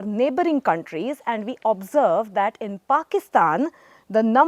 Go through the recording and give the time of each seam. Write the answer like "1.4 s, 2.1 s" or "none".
none